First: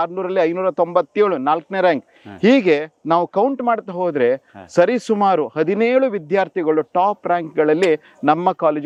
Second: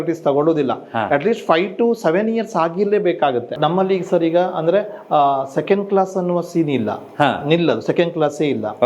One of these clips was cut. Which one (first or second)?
second